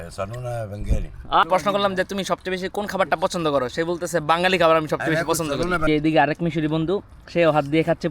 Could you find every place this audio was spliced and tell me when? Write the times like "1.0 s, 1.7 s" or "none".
1.4 s, 5.8 s

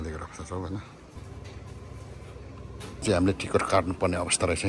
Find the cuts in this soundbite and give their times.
1.0 s

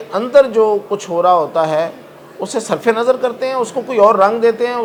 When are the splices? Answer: none

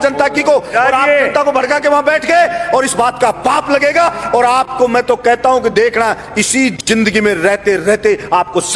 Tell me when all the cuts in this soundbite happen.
none

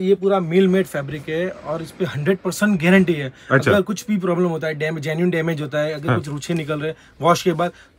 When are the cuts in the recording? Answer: none

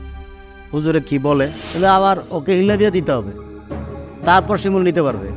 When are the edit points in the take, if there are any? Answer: 1.6 s

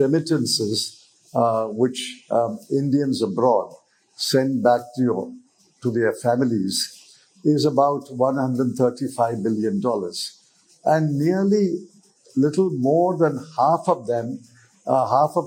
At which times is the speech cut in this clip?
none

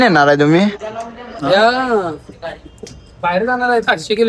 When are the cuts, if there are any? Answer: none

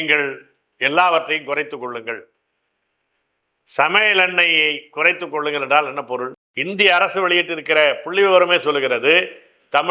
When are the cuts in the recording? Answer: 6.5 s

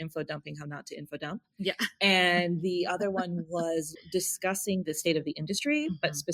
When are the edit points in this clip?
3.9 s

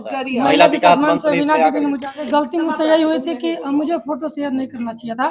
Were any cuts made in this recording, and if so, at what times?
2.1 s

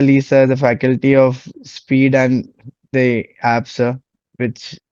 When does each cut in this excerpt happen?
none

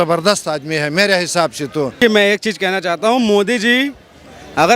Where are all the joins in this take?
2.0 s

